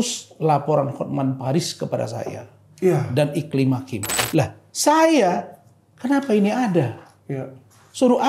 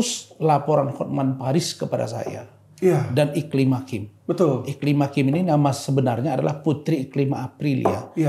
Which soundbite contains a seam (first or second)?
first